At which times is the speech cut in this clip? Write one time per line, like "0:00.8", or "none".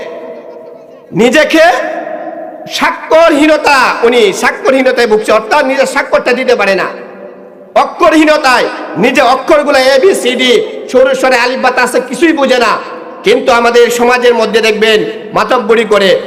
none